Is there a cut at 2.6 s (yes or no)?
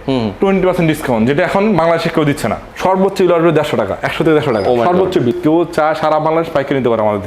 yes